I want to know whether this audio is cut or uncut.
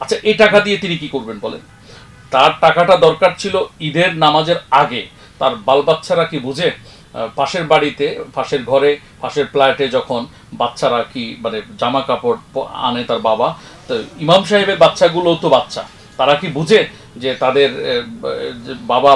uncut